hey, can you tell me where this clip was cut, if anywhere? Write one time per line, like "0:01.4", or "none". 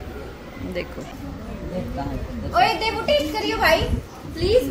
0:01.1